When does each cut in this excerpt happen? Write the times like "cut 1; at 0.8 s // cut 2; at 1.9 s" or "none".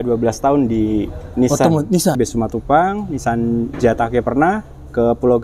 cut 1; at 2.2 s

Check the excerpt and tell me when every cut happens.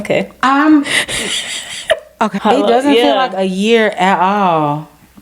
cut 1; at 2.4 s

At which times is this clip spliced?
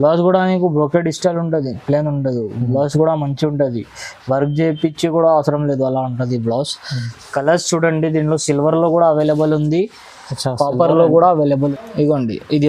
cut 1; at 11.6 s

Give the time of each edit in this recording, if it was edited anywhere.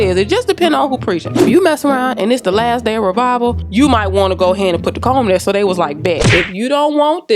cut 1; at 3.6 s // cut 2; at 6.2 s

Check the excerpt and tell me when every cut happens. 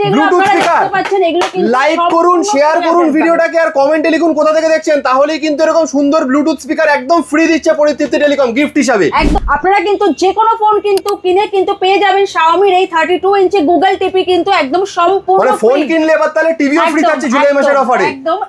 cut 1; at 9.3 s

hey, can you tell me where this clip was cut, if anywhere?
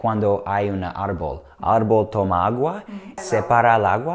cut 1; at 3.2 s

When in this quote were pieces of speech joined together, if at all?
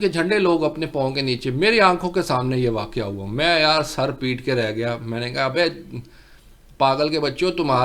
none

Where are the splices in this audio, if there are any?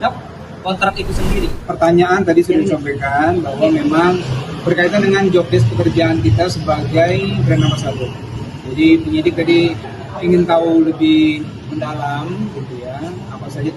cut 1; at 1.6 s

